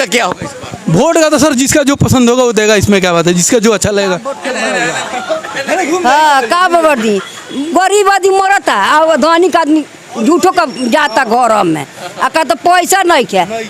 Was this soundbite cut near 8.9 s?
no; 1 cut; at 4.3 s

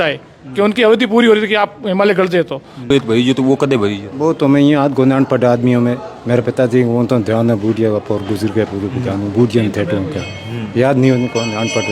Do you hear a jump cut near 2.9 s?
yes; 1 cut; at 2.9 s

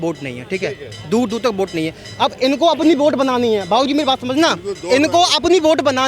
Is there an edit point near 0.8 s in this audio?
no; 0 cuts

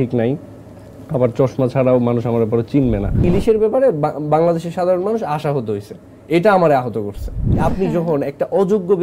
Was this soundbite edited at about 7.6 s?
yes; 2 cuts; at 3.2 s, 7.6 s

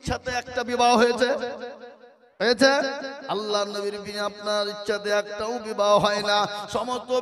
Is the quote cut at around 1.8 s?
no; 0 cuts

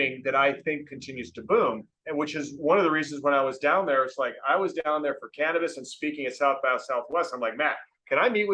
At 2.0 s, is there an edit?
yes; 1 cut; at 2.0 s

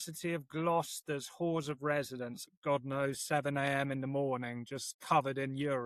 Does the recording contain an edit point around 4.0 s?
no; 1 cut; at 2.4 s

